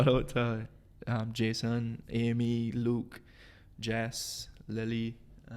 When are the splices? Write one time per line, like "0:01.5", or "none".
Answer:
none

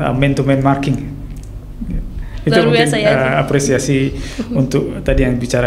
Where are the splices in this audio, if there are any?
none

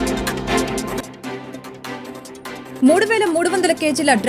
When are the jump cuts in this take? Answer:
0:01.0

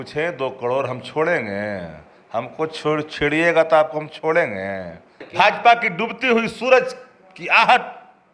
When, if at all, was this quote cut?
0:05.2

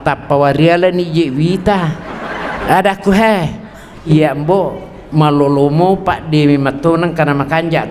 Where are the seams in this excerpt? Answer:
0:02.5
0:04.1

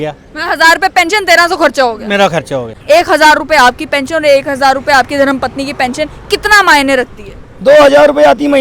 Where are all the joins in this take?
0:02.7

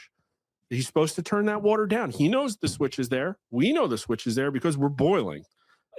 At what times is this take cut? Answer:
none

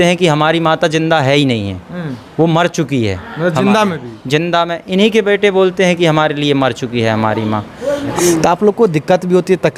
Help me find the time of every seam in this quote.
0:08.1

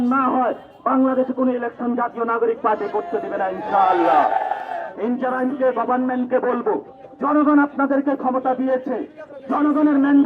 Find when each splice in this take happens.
0:04.8

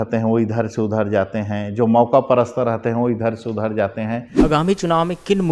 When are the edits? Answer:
0:04.3

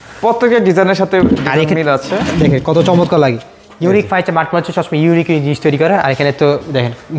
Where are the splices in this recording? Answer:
none

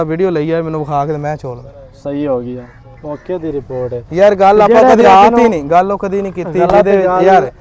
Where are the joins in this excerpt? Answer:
none

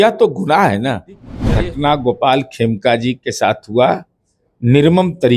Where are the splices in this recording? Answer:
0:01.4

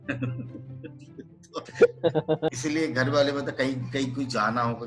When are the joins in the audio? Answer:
0:02.6

